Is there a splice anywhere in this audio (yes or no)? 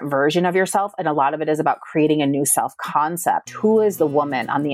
no